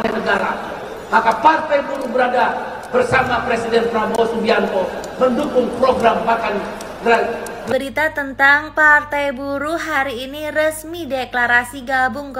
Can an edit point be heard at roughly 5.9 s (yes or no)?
no